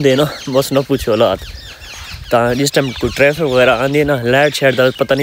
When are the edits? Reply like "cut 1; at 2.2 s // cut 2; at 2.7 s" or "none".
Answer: none